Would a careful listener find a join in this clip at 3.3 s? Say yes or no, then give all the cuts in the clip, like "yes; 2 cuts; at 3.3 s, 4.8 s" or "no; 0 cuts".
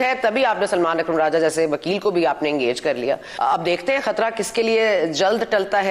yes; 1 cut; at 3.3 s